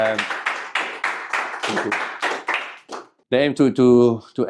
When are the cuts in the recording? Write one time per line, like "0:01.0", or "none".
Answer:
0:03.2